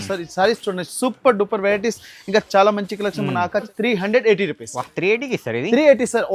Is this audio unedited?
no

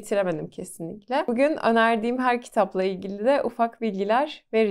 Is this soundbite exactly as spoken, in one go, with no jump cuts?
yes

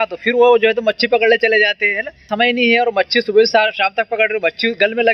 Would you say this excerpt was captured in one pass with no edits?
no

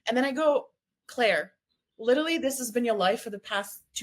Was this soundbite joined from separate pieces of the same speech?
no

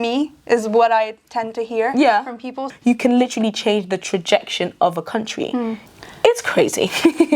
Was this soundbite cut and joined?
yes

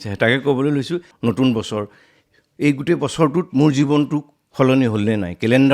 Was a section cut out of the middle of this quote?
yes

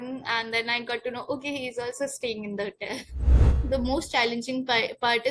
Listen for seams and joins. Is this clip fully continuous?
no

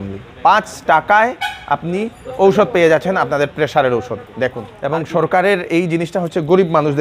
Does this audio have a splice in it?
yes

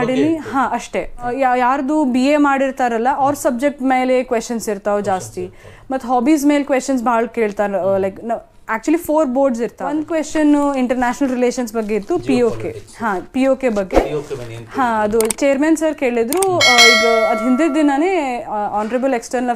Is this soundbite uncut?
no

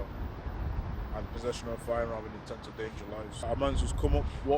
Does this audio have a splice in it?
yes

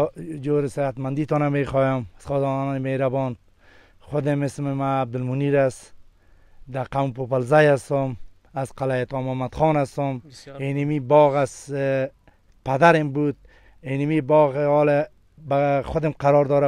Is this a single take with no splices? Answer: yes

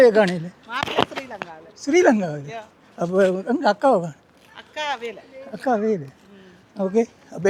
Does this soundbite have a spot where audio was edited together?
no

